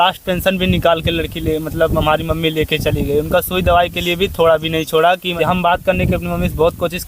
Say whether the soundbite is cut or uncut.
cut